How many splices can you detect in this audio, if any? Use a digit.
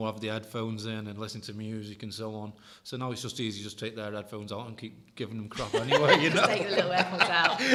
0